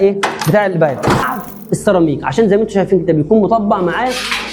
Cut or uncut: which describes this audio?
cut